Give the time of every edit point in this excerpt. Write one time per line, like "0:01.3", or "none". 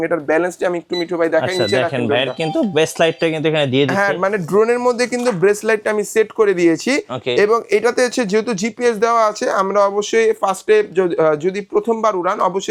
none